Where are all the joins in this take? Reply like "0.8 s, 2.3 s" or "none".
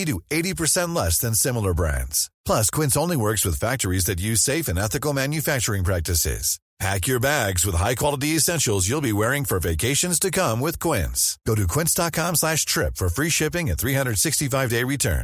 none